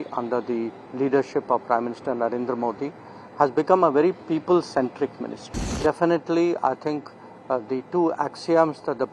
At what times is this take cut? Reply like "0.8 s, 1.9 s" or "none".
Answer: 5.7 s